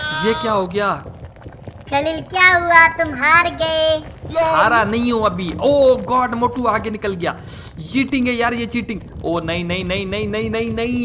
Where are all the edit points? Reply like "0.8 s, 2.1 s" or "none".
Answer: none